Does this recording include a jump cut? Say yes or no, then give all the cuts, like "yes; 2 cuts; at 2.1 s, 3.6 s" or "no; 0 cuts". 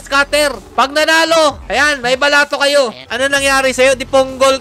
yes; 1 cut; at 3.0 s